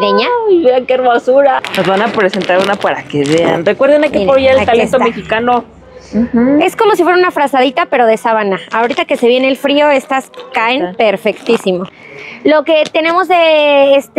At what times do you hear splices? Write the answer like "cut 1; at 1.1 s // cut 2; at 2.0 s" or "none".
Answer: cut 1; at 1.6 s // cut 2; at 12.0 s